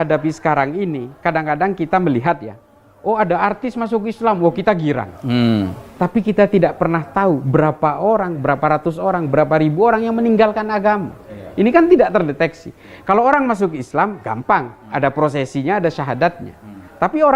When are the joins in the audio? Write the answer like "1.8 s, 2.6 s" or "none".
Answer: none